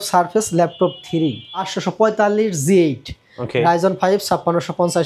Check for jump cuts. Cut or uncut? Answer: cut